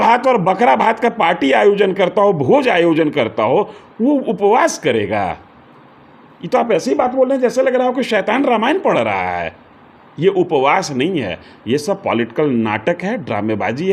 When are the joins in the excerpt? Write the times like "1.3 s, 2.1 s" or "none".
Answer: none